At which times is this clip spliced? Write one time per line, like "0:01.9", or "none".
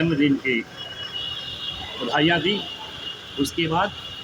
none